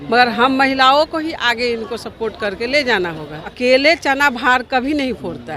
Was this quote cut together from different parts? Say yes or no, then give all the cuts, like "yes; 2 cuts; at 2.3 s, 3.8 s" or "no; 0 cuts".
yes; 1 cut; at 3.5 s